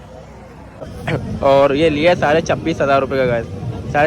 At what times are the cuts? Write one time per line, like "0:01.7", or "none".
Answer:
0:01.0